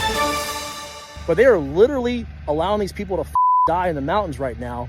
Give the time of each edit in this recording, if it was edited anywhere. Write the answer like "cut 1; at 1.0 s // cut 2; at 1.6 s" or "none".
cut 1; at 1.0 s